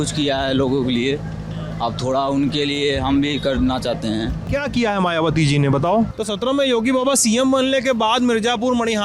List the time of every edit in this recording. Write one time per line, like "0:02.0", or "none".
0:04.4
0:06.1